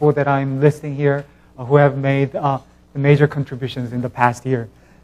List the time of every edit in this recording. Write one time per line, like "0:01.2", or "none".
none